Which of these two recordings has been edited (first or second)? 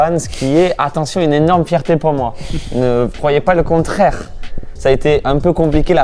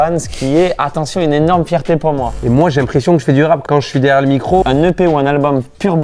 second